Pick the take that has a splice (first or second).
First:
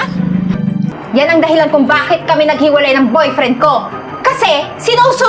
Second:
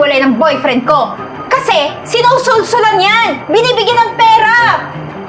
first